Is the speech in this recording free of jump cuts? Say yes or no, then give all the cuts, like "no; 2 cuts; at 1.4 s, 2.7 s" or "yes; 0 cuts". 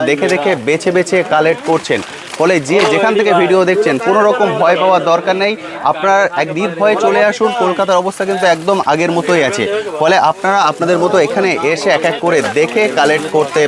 yes; 0 cuts